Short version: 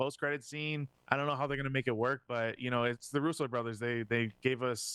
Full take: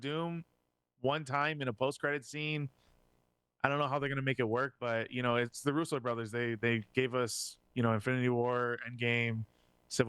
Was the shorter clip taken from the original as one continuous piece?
no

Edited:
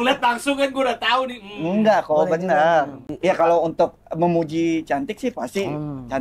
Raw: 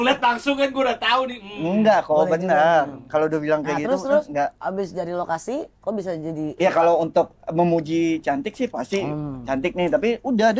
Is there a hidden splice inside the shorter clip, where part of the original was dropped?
yes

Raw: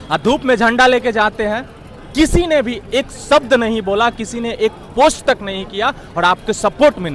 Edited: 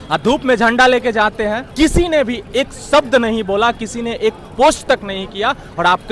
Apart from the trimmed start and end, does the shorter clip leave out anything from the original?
yes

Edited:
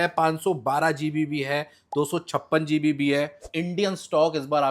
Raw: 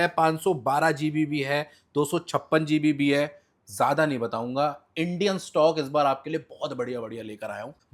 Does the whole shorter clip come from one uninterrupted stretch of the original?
no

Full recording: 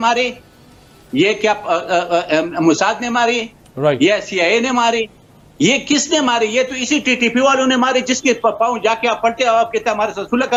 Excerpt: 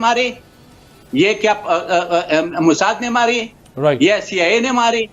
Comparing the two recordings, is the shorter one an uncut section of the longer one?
yes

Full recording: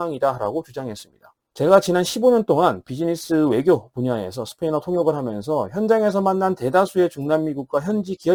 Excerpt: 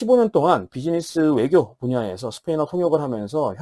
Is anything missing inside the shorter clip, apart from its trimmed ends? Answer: no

